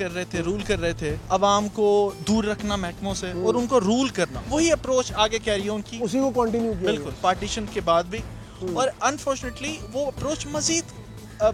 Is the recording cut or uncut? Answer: cut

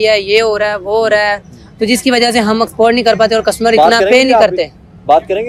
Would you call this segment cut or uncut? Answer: uncut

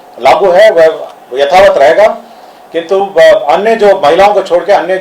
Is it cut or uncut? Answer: uncut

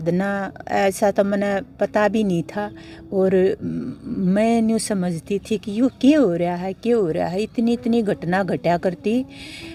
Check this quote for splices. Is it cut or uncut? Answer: uncut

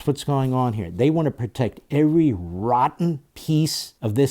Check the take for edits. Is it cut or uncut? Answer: cut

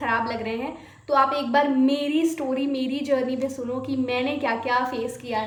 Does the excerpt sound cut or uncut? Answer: uncut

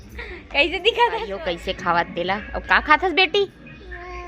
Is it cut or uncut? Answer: cut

